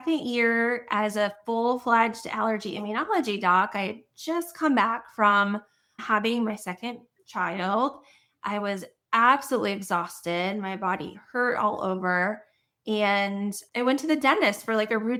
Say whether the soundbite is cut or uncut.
uncut